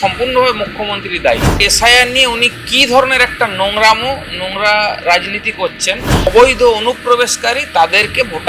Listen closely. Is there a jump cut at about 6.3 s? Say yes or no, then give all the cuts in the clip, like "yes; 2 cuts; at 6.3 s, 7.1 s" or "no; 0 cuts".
yes; 2 cuts; at 1.7 s, 6.3 s